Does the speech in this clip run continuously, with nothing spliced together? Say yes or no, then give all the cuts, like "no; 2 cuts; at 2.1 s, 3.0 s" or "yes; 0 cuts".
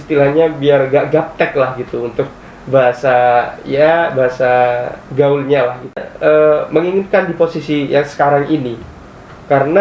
no; 1 cut; at 6.1 s